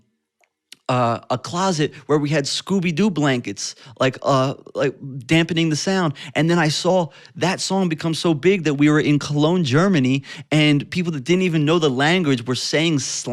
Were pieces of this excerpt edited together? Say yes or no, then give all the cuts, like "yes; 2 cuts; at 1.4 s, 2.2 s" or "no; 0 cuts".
no; 0 cuts